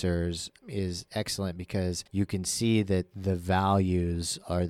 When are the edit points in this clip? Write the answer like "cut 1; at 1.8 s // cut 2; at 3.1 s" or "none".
cut 1; at 0.9 s // cut 2; at 2.0 s